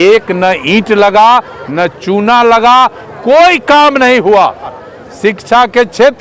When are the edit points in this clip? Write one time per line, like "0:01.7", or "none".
0:04.8